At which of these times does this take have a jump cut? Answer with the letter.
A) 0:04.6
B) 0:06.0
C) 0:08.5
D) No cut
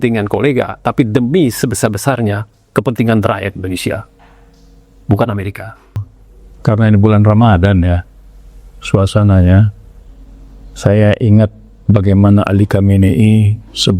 B